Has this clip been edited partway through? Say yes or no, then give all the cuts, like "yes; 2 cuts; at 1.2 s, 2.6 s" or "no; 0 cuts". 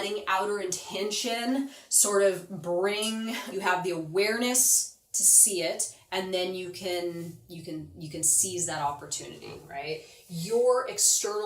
yes; 2 cuts; at 3.4 s, 10.2 s